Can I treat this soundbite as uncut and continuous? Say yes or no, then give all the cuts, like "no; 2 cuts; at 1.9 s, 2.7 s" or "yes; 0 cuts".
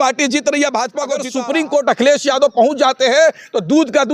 no; 1 cut; at 1.2 s